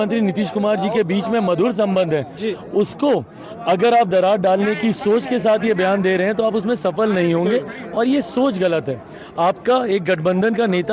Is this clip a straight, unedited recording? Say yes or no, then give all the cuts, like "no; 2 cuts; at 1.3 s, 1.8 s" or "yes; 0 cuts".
yes; 0 cuts